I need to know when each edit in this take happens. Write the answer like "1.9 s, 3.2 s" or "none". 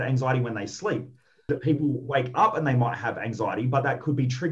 1.5 s